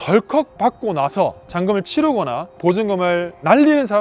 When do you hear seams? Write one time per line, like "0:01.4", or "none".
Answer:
none